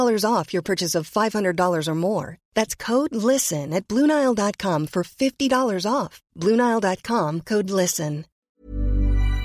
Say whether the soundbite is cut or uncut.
cut